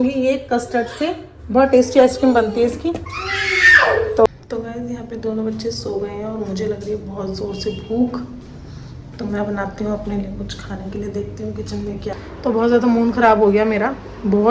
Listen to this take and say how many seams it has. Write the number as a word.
two